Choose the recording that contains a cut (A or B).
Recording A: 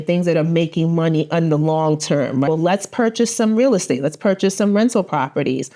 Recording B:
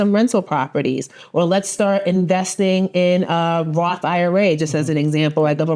A